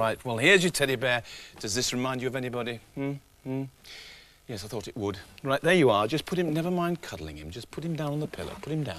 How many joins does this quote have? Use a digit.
1